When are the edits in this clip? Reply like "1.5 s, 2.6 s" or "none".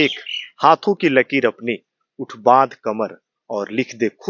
none